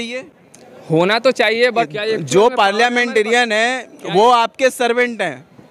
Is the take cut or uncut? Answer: cut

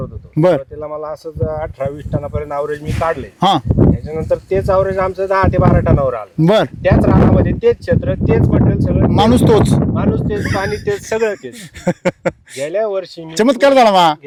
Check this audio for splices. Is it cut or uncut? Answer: uncut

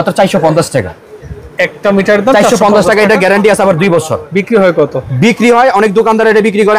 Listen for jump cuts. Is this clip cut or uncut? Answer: uncut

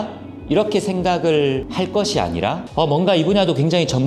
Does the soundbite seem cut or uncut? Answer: cut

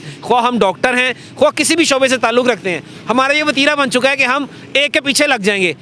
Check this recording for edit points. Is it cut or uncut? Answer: uncut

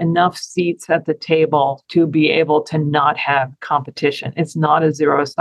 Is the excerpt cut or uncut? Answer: uncut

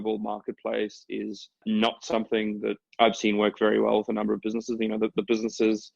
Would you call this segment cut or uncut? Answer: cut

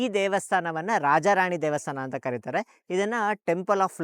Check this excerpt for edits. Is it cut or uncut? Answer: uncut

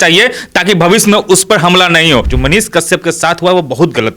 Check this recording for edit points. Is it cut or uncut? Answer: cut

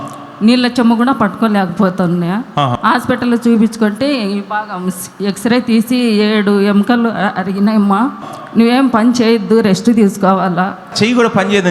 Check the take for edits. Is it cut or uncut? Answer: cut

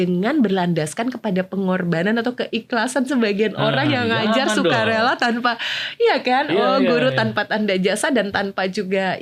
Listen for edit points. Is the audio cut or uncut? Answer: uncut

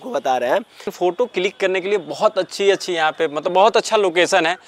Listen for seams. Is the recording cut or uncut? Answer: cut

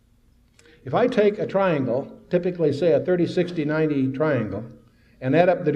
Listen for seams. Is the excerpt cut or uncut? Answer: cut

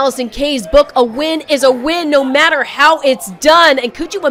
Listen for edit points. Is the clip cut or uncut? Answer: uncut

